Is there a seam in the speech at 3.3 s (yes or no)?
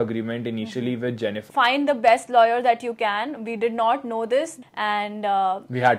no